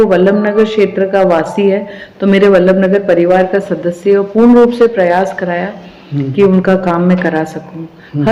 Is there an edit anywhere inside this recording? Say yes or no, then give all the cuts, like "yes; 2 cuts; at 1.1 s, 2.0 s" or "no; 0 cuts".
no; 0 cuts